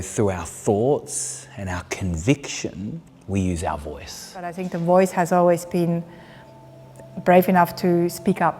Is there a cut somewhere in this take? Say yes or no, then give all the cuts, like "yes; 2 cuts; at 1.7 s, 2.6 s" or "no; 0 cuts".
yes; 1 cut; at 4.7 s